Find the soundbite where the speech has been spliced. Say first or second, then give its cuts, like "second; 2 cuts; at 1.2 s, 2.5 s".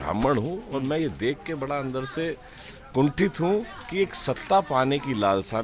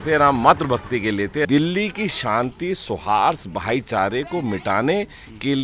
second; 1 cut; at 1.4 s